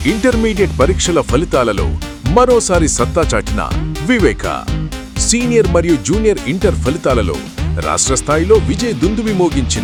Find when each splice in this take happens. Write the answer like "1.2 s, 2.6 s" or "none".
none